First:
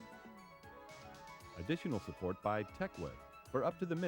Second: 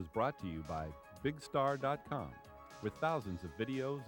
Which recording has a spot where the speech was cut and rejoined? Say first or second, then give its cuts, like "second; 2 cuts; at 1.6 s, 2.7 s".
first; 1 cut; at 1.5 s